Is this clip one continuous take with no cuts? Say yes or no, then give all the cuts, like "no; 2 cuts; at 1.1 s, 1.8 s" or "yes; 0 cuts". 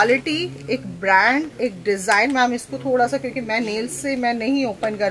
yes; 0 cuts